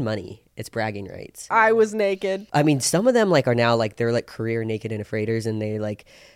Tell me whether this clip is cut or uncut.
cut